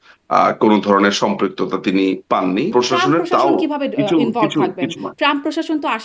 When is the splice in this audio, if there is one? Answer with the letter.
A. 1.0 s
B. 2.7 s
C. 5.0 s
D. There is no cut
B